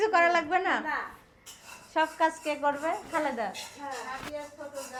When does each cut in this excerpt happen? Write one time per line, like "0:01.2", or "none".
none